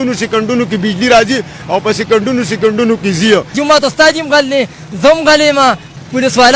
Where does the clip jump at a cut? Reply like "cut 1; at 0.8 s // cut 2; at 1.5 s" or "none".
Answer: cut 1; at 3.5 s